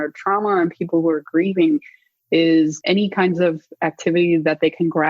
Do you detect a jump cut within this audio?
yes; 1 cut; at 2.8 s

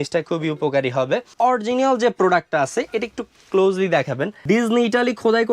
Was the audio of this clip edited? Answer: yes; 2 cuts; at 1.3 s, 4.4 s

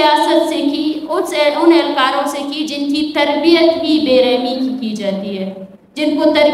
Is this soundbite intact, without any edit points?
yes; 0 cuts

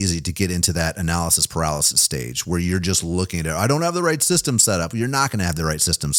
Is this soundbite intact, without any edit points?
yes; 0 cuts

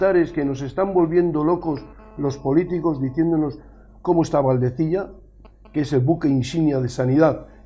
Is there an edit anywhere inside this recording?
yes; 1 cut; at 4.4 s

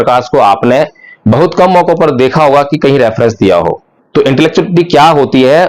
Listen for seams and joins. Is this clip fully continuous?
no; 1 cut; at 3.9 s

